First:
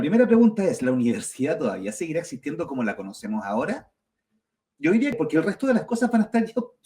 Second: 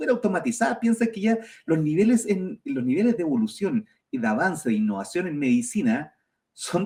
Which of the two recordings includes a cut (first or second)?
first